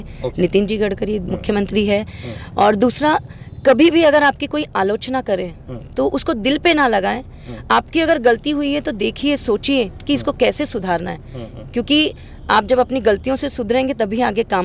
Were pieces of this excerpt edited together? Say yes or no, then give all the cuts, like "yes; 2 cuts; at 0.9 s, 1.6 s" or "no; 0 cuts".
no; 0 cuts